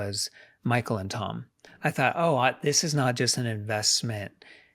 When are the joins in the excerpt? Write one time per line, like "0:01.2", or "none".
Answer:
0:01.6